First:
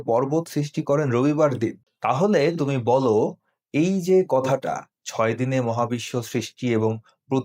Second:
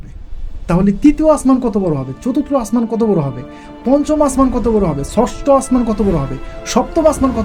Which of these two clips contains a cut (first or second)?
first